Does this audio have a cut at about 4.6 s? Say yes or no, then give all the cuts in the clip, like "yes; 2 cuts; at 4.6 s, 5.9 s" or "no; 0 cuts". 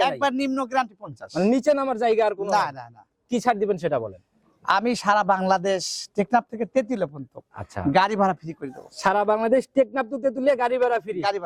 no; 0 cuts